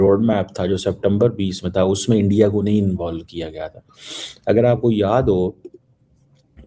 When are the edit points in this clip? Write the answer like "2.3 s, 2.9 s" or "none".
none